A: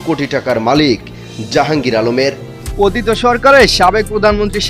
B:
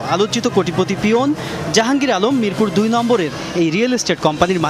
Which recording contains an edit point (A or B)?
A